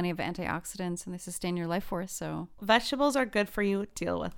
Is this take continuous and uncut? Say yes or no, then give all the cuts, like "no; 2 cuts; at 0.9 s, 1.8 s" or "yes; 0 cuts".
no; 1 cut; at 2.6 s